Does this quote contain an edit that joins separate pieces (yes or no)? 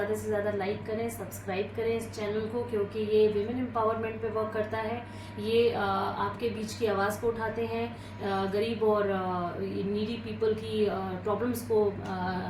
no